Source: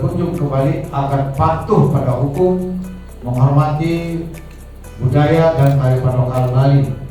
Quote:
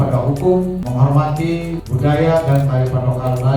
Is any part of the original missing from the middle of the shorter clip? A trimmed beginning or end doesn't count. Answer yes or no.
yes